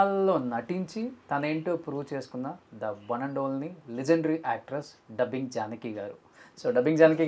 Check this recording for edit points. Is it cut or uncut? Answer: uncut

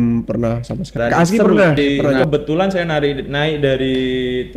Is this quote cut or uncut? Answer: cut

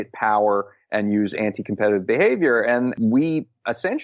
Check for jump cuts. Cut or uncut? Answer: cut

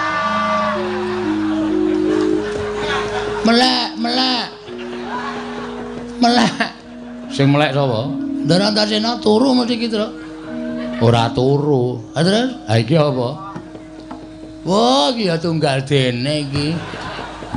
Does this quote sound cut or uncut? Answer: uncut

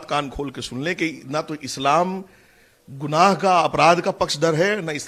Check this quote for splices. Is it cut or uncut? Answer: uncut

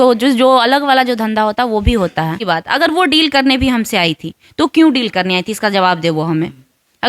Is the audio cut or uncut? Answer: cut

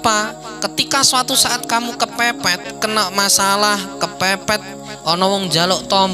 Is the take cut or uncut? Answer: cut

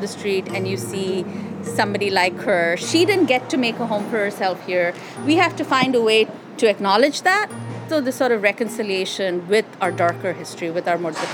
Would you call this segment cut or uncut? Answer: cut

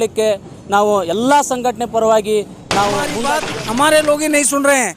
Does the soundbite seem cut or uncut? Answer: cut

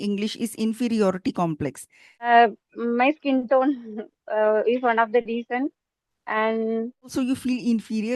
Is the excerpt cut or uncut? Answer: cut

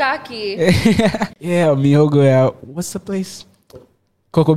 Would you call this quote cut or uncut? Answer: cut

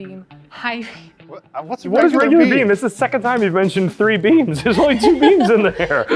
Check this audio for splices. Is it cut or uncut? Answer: uncut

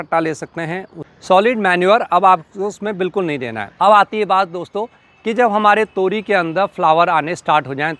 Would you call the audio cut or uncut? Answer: cut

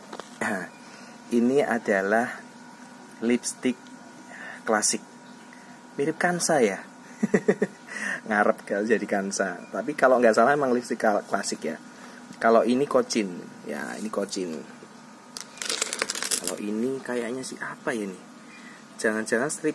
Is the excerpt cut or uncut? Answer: uncut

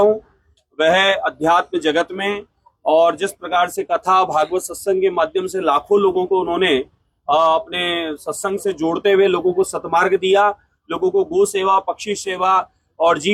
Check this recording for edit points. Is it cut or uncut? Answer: uncut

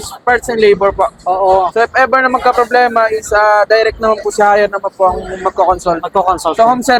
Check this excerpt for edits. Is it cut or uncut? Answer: uncut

